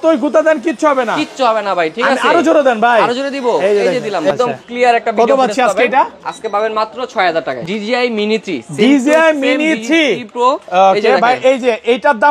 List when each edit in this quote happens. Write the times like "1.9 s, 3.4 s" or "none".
4.3 s, 7.6 s